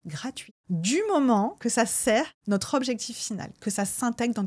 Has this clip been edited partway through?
yes; 2 cuts; at 1.6 s, 2.4 s

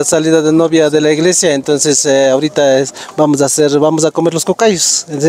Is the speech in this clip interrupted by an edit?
no; 0 cuts

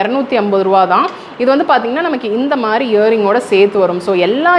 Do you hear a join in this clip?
no; 0 cuts

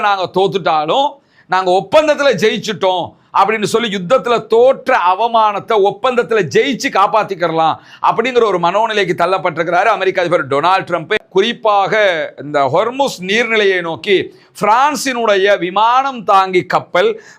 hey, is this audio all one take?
no; 1 cut; at 11.2 s

